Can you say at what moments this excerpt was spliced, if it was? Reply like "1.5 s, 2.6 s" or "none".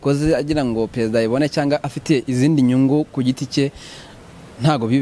none

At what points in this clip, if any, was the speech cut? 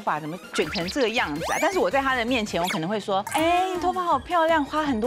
3.3 s

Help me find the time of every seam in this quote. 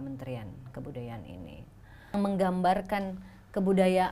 2.1 s

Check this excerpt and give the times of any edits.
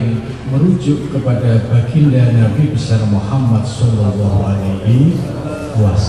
none

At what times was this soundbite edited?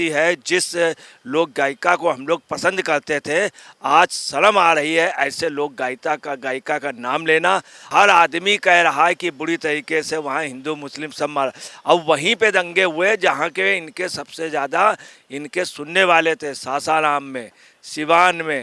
none

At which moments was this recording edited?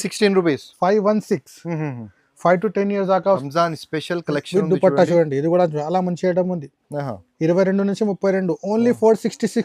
3.4 s

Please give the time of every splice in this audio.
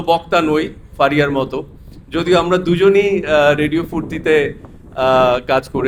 none

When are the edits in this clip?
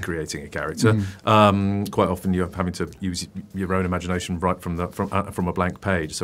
none

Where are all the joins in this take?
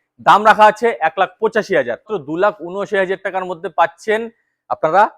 2.1 s

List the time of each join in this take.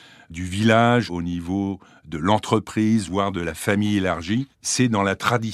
1.1 s

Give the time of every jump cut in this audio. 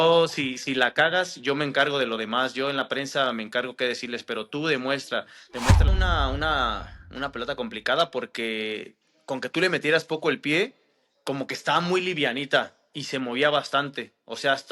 5.9 s

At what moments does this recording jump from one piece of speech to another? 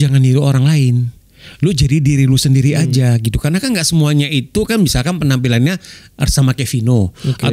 none

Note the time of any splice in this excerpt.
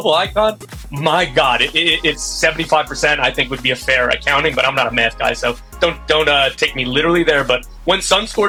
none

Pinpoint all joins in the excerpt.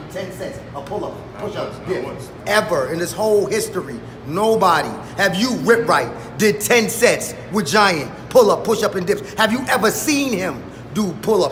none

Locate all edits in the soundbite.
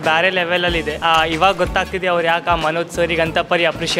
0.9 s

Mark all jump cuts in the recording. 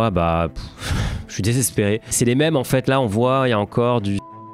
2.1 s

